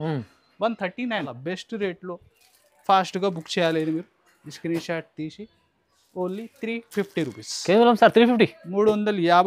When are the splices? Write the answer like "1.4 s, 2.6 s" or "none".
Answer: 1.4 s